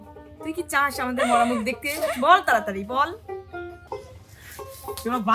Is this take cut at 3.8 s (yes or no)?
yes